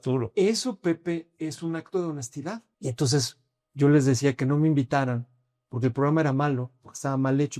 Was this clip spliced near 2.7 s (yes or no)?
yes